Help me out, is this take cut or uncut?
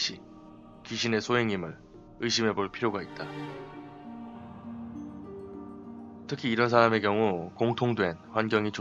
cut